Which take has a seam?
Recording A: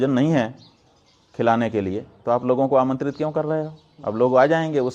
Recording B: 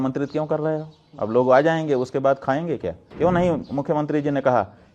B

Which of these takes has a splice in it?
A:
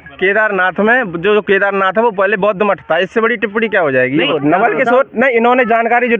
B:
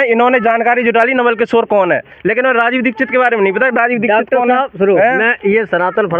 A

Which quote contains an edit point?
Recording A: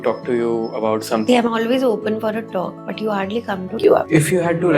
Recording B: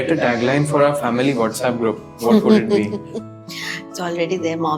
A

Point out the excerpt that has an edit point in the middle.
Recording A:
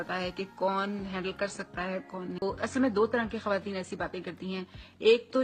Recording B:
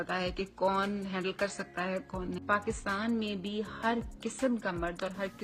B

